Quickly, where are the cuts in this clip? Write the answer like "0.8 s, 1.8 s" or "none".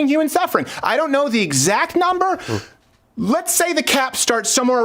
none